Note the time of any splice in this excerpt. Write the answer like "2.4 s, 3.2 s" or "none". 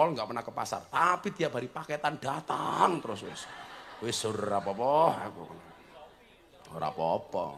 none